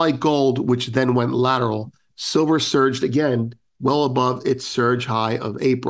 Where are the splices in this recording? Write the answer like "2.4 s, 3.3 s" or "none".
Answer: none